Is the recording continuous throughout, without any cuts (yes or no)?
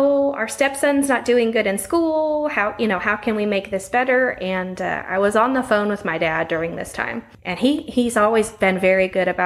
no